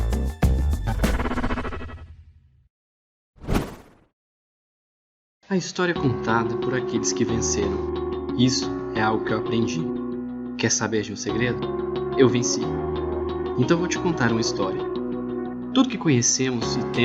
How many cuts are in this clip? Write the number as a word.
one